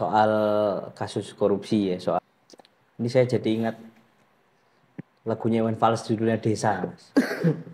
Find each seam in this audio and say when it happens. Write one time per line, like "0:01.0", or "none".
0:02.2

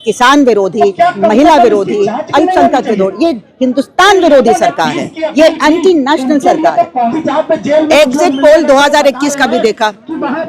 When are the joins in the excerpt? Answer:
0:07.2

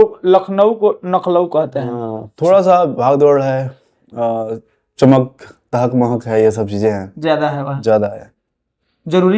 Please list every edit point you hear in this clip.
0:02.2

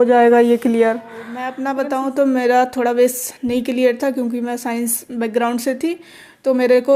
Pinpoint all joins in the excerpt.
0:01.5

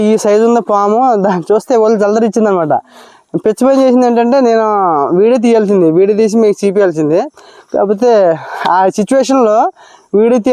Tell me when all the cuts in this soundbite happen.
none

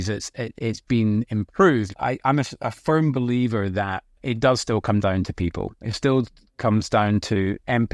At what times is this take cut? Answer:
0:01.9
0:04.2

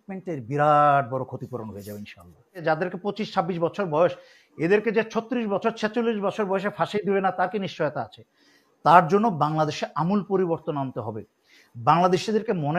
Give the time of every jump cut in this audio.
0:02.6

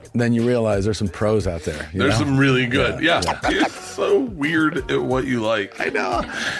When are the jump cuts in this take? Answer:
0:03.4

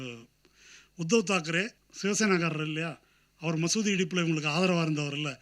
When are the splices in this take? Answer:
0:01.8

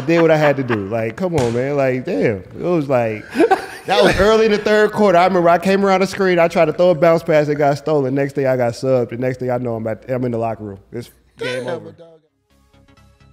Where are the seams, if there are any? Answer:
0:12.0

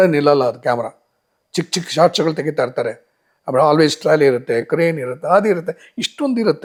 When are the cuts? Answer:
none

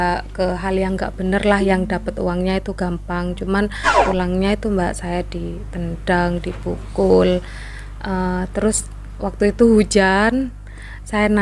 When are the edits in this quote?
0:03.9

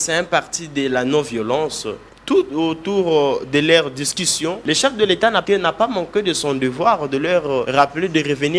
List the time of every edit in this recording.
0:02.3
0:04.6
0:05.4
0:07.7

